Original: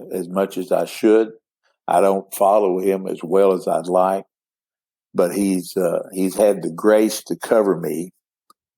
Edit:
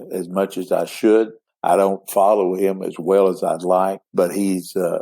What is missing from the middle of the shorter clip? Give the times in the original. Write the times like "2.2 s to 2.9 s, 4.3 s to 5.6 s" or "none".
1.5 s to 1.7 s, 4.3 s to 5.0 s

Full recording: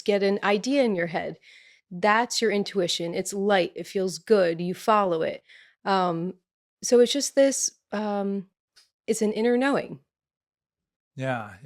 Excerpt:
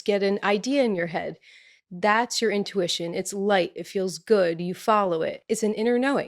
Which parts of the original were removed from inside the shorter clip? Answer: 5.4 s to 9.0 s

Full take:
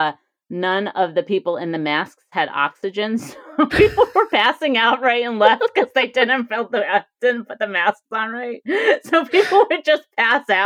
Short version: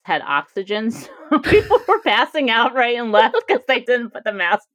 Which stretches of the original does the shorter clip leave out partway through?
6.1 s to 7.2 s

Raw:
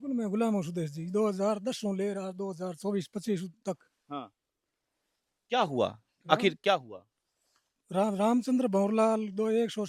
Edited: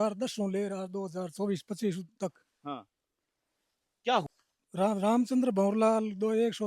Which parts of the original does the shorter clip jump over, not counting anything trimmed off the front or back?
5.7 s to 7.4 s

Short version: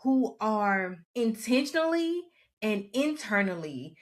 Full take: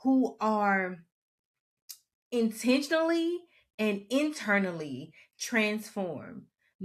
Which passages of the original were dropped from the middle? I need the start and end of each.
1.0 s to 2.2 s

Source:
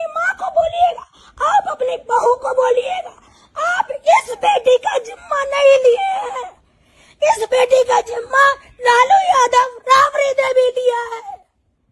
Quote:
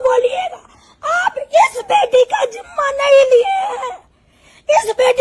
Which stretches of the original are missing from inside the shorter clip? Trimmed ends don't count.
none

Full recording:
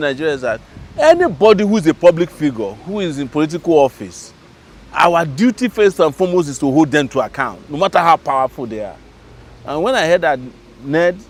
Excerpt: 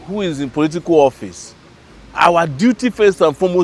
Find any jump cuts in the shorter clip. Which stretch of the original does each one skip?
none

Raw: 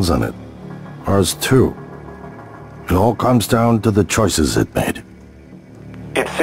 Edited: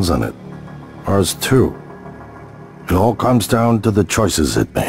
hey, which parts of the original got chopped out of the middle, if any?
none

